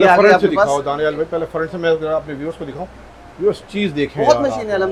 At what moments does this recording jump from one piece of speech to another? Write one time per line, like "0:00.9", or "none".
none